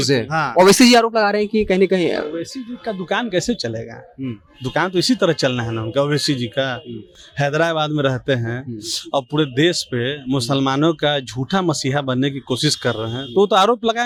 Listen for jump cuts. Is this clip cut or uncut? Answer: uncut